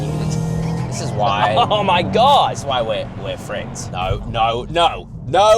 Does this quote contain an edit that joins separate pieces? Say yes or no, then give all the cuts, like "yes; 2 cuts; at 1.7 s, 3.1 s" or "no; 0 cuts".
yes; 1 cut; at 3.8 s